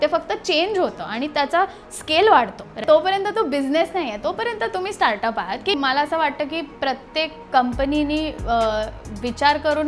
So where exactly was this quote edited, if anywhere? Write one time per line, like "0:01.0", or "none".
0:02.8
0:05.7